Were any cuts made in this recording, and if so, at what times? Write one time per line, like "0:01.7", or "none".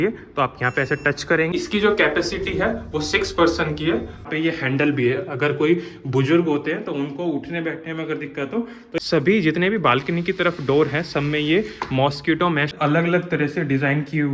0:01.5
0:04.3
0:09.0
0:12.7